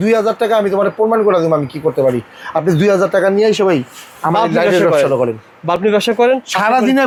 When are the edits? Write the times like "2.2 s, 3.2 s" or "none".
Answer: none